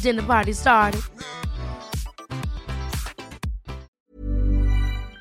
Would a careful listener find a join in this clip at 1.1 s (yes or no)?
no